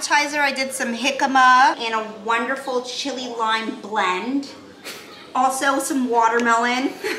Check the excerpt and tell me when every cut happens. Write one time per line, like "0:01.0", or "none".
0:01.8